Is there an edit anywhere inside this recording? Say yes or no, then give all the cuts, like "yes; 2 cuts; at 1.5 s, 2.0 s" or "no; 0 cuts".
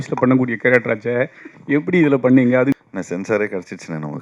yes; 1 cut; at 2.7 s